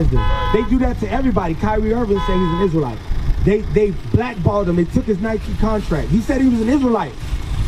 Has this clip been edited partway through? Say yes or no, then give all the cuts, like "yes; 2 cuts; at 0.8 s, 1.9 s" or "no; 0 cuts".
no; 0 cuts